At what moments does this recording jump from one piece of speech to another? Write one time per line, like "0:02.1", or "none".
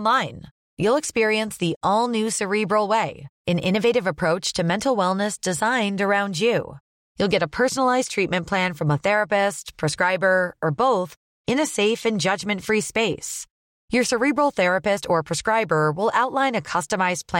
none